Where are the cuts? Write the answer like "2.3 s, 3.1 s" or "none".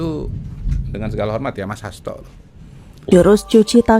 2.9 s

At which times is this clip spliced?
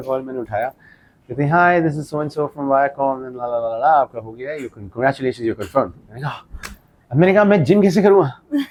none

